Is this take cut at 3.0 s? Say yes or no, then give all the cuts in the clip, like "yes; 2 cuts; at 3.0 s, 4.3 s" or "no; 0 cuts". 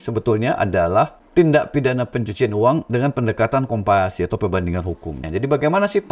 no; 2 cuts; at 1.2 s, 5.2 s